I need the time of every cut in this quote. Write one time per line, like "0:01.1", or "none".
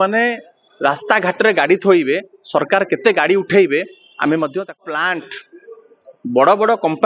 0:04.8